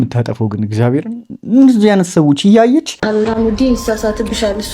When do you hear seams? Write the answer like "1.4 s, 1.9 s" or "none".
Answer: 3.0 s